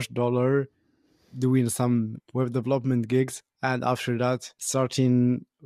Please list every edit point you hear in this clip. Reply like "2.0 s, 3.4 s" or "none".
none